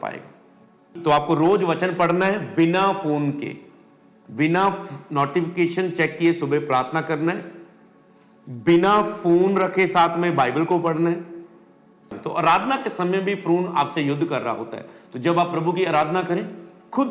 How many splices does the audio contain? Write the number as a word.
two